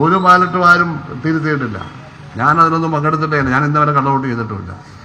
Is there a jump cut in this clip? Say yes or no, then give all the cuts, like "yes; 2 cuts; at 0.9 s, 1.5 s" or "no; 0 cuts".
no; 0 cuts